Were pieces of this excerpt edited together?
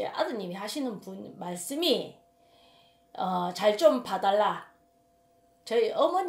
no; 0 cuts

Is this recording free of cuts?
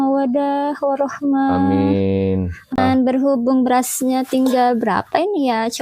no; 1 cut; at 2.8 s

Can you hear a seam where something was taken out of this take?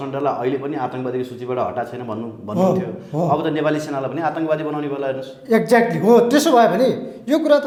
no; 0 cuts

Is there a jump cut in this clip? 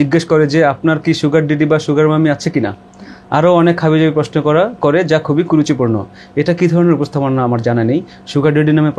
no; 0 cuts

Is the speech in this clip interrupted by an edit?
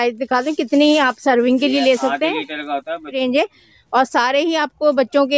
yes; 1 cut; at 3.1 s

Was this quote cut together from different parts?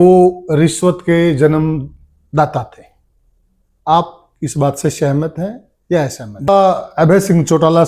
yes; 1 cut; at 6.5 s

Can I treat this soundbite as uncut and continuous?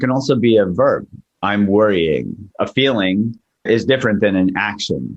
no; 2 cuts; at 2.5 s, 3.6 s

